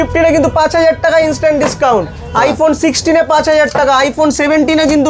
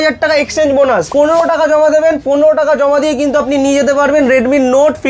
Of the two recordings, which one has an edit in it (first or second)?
second